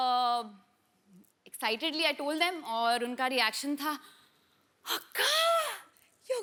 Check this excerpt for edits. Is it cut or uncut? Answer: uncut